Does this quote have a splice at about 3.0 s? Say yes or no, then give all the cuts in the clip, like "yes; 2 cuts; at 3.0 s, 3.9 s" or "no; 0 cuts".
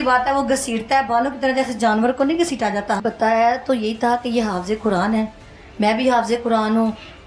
yes; 1 cut; at 3.0 s